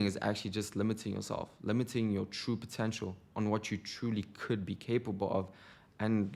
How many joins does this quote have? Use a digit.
0